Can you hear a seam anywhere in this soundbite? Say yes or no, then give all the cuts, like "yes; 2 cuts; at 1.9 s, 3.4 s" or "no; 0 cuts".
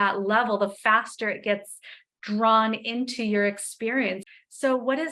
yes; 1 cut; at 4.2 s